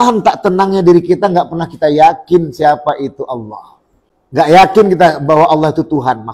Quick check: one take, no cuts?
no; 1 cut; at 4.5 s

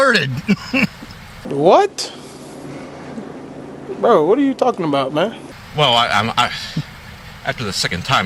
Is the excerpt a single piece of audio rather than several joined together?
yes; 0 cuts

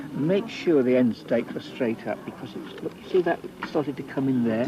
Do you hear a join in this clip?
yes; 1 cut; at 2.0 s

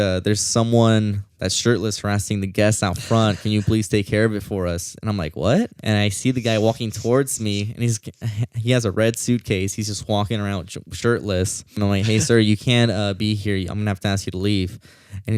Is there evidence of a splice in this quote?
yes; 2 cuts; at 5.8 s, 11.8 s

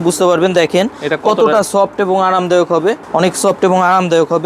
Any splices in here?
yes; 1 cut; at 3.0 s

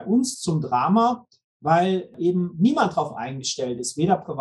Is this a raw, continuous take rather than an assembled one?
no; 1 cut; at 2.1 s

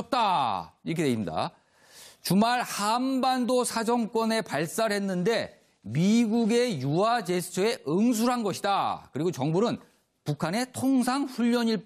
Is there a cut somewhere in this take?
no; 0 cuts

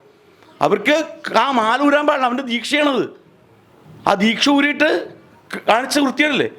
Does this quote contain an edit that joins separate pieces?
no; 0 cuts

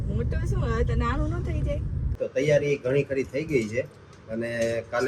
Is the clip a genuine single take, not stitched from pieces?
no; 1 cut; at 2.1 s

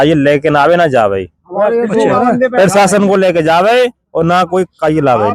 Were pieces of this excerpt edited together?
no; 0 cuts

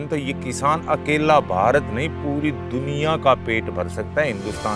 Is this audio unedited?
yes; 0 cuts

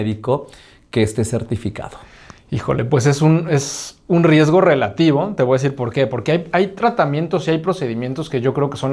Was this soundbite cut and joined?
no; 0 cuts

